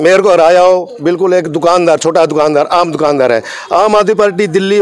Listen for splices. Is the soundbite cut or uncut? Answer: uncut